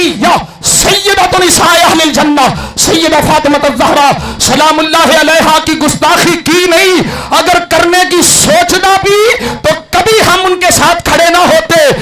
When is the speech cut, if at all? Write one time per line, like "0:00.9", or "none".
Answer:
none